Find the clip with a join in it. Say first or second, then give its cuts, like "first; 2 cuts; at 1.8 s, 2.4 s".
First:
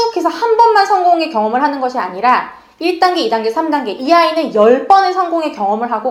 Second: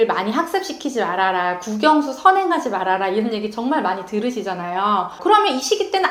second; 1 cut; at 5.2 s